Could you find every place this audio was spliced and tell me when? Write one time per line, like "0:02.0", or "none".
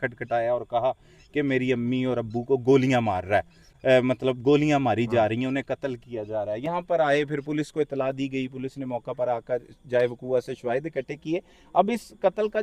none